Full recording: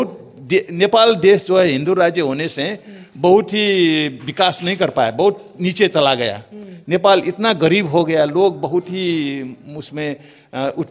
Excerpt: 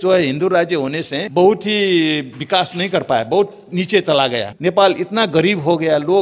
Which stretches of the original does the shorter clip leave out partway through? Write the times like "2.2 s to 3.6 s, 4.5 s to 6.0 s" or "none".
2.6 s to 3.0 s, 6.3 s to 6.7 s